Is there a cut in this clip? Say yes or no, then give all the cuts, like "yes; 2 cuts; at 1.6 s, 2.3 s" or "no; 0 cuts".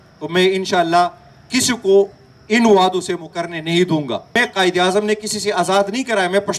yes; 1 cut; at 4.3 s